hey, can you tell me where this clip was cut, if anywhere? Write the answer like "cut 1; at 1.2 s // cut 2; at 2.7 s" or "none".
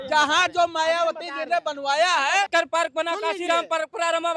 cut 1; at 2.5 s